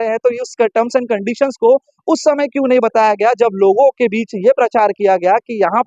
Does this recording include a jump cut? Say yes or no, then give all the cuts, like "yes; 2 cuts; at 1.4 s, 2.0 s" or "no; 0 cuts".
no; 0 cuts